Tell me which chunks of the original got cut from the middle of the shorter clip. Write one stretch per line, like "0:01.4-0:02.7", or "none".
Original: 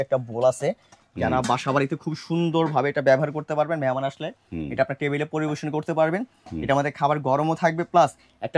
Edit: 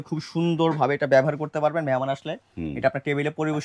none